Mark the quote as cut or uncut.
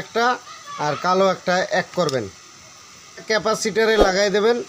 cut